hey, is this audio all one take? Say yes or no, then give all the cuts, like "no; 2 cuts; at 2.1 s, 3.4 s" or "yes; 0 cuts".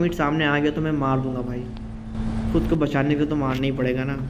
yes; 0 cuts